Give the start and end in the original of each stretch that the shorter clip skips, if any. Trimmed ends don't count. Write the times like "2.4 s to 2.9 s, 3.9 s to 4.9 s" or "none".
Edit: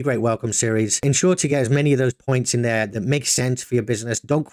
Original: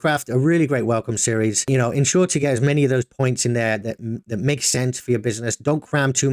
1.6 s to 1.9 s, 3.8 s to 4.3 s